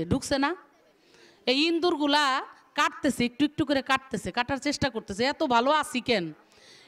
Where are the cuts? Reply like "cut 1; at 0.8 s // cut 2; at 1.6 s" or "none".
none